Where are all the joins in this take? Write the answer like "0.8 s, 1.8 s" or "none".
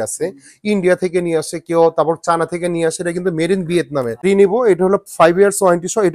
4.2 s